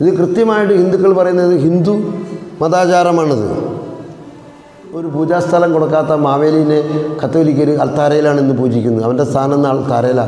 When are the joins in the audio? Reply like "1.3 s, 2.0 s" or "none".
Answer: 5.1 s